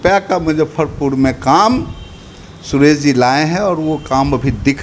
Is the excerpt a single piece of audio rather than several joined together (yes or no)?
yes